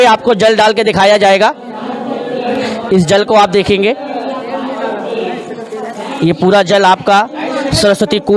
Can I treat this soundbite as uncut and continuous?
yes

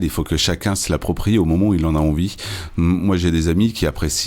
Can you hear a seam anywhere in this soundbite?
no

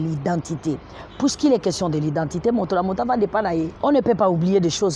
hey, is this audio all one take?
no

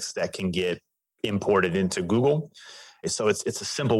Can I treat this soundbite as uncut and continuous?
no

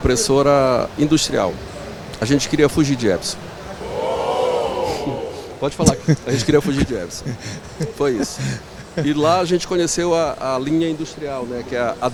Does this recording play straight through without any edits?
yes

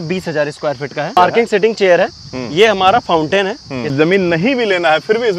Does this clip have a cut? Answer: yes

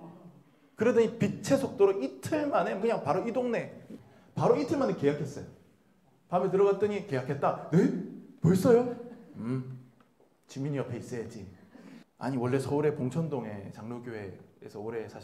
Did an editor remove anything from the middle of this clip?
yes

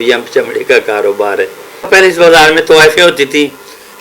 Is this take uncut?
no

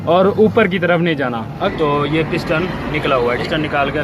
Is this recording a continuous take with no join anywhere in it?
no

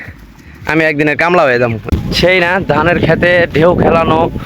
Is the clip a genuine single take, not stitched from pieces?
no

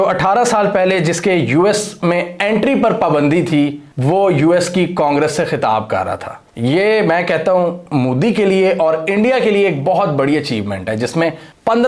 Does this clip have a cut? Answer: no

